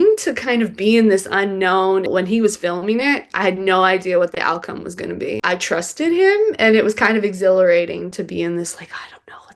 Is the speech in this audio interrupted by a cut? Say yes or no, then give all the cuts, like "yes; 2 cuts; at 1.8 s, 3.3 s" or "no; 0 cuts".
yes; 2 cuts; at 2.1 s, 5.4 s